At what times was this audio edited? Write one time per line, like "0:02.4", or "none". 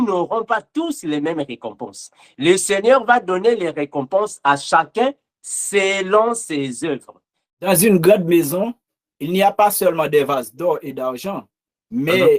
0:07.7